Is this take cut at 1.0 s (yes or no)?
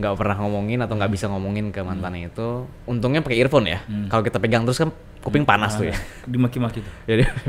no